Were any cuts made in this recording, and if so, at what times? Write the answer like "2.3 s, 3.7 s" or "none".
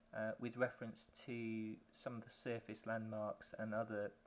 none

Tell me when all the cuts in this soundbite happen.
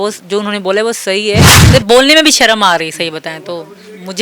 1.5 s

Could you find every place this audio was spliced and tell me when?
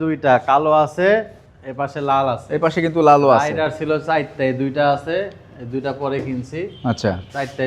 none

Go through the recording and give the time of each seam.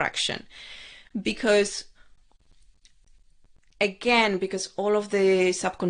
none

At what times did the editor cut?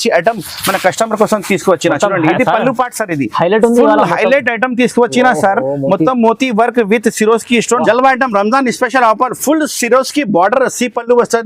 7.8 s

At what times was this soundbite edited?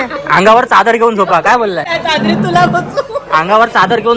1.9 s

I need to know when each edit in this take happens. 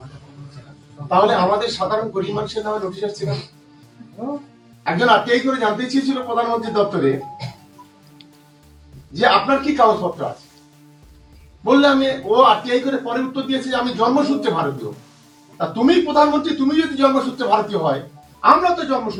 none

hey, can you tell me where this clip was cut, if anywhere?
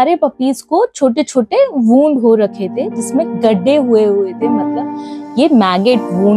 none

